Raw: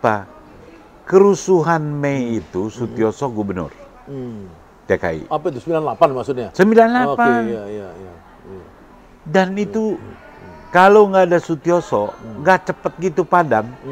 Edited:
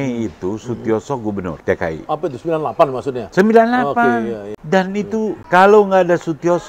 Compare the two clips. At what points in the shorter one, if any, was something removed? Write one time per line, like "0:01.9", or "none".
0:01.6
0:04.5
0:05.4

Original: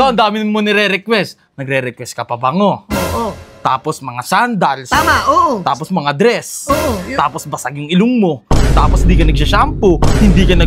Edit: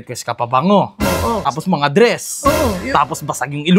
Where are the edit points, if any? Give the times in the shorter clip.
0:01.5

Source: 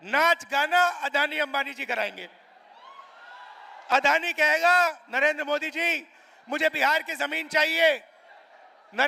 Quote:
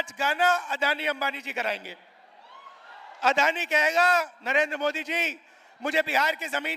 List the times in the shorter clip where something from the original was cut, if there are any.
0:03.2

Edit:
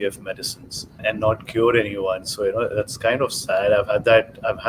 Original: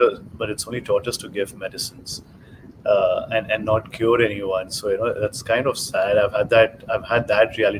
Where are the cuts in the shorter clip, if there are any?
0:01.0

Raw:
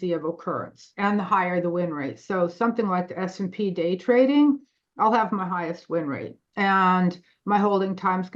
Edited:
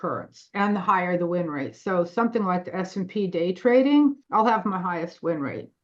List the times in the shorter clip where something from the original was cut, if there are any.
0:04.2

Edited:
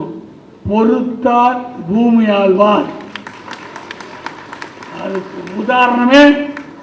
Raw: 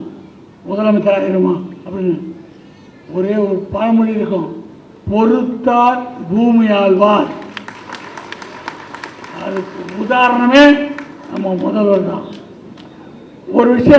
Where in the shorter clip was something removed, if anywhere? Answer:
none

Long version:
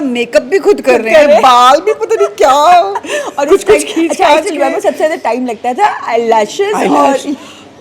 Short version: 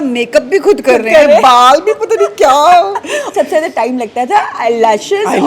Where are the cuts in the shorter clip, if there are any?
0:03.3

